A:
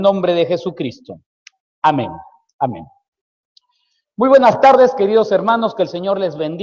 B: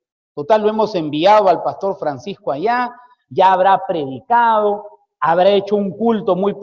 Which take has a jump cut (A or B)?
B